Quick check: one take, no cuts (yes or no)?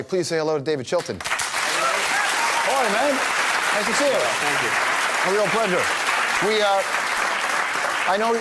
yes